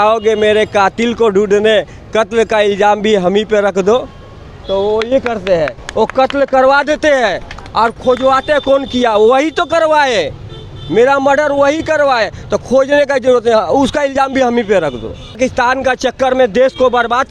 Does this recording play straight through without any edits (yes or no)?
no